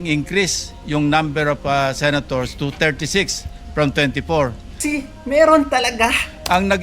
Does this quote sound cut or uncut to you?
cut